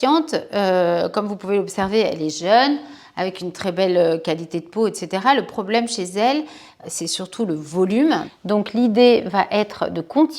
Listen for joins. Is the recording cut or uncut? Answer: cut